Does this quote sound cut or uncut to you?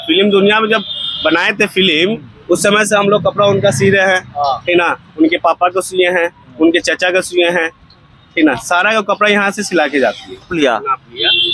cut